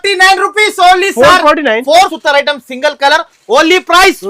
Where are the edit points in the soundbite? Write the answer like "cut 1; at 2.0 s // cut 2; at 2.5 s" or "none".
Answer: cut 1; at 2.1 s